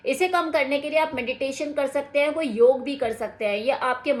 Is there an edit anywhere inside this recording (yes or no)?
no